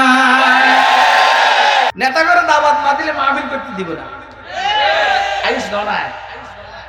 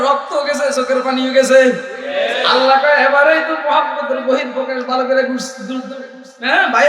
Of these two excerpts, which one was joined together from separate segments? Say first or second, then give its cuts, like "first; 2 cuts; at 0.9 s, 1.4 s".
first; 1 cut; at 1.9 s